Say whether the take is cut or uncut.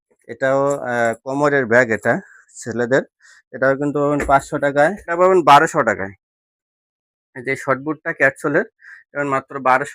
cut